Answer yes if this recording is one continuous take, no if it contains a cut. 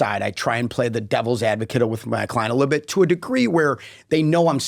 yes